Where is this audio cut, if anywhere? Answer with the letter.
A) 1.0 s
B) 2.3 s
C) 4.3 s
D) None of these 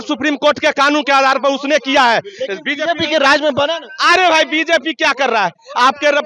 D